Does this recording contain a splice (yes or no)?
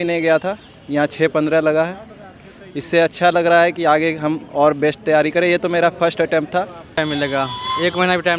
yes